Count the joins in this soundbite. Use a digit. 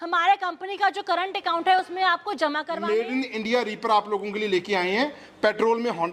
1